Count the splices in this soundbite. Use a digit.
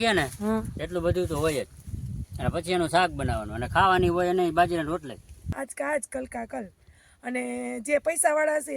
1